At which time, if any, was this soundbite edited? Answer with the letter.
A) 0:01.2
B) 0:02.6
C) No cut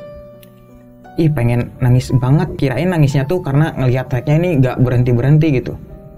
B